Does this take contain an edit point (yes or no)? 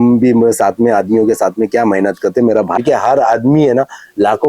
yes